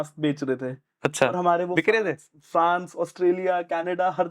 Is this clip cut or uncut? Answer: uncut